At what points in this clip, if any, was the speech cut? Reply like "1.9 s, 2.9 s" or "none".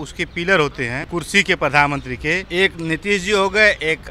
1.0 s, 2.4 s